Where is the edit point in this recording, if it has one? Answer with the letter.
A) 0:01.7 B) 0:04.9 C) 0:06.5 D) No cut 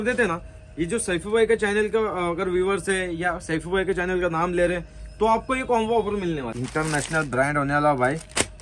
C